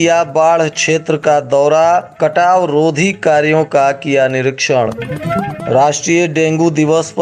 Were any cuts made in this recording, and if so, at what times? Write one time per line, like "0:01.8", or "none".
none

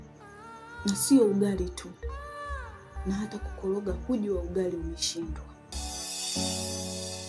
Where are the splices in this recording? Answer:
0:05.8

